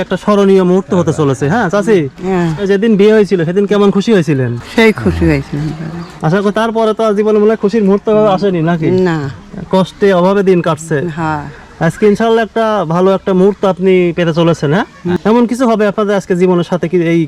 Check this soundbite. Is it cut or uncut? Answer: uncut